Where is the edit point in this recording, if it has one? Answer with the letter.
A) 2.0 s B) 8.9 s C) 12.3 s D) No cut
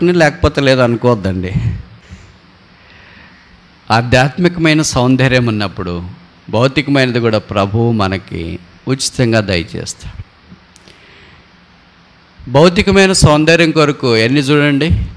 D